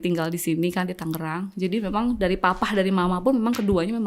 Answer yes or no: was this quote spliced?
no